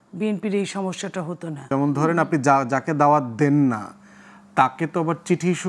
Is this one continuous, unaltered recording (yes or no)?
no